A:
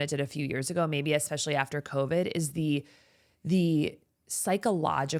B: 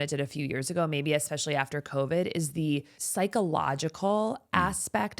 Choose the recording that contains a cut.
B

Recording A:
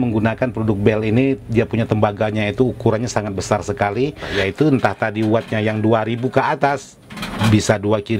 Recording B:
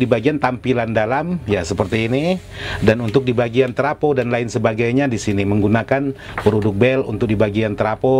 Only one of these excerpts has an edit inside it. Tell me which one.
A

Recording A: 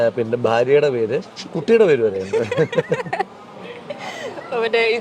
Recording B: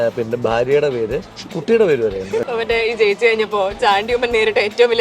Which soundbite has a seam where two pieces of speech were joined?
B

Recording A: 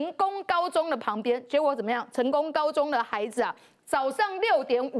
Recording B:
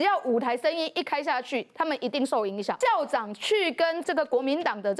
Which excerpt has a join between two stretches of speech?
B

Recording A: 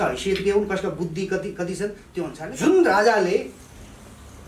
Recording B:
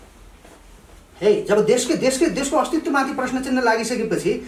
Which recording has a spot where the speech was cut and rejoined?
A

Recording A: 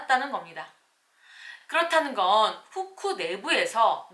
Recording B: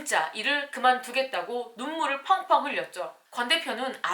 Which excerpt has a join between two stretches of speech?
B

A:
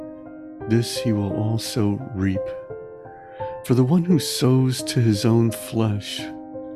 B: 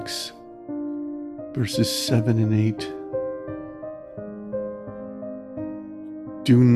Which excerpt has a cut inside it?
B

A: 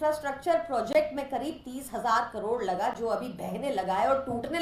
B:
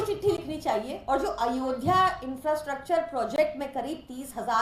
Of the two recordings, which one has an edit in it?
B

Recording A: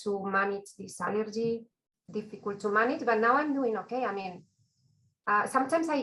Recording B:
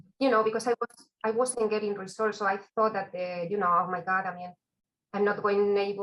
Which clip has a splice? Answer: A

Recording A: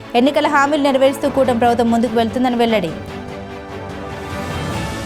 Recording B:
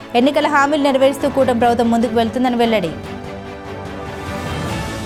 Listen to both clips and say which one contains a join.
A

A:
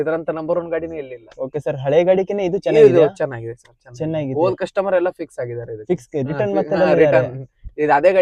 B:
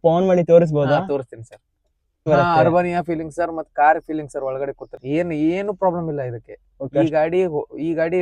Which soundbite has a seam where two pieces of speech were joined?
B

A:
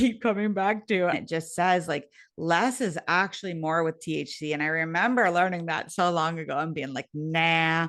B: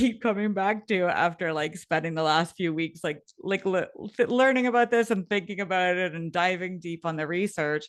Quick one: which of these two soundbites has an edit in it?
A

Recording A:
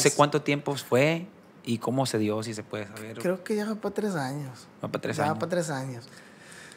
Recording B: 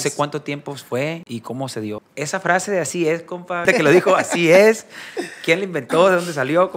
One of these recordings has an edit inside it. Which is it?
B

